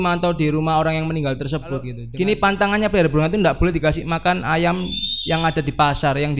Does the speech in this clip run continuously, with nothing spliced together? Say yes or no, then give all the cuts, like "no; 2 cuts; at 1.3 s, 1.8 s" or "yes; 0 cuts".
no; 1 cut; at 2.0 s